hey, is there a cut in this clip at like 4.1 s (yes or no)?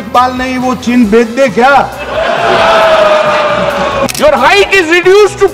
yes